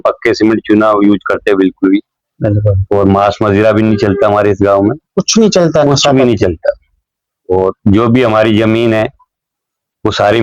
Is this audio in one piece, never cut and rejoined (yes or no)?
yes